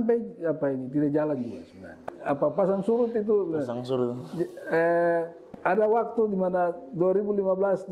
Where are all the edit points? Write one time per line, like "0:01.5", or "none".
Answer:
0:02.1
0:05.8